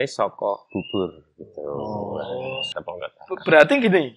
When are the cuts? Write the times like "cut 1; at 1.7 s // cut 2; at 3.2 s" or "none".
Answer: cut 1; at 2.7 s